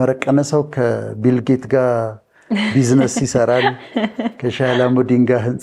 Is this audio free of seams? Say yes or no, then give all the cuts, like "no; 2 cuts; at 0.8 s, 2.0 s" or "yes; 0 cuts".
yes; 0 cuts